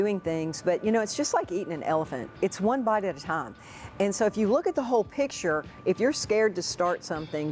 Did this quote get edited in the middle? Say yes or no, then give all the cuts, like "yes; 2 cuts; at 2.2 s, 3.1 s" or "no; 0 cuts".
yes; 1 cut; at 5.7 s